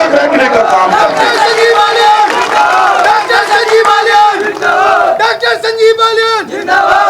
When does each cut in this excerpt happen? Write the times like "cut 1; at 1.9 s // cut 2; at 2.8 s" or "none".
none